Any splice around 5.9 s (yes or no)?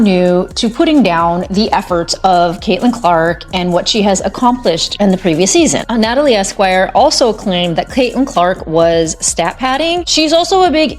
yes